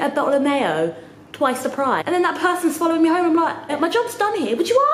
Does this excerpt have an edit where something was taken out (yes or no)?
yes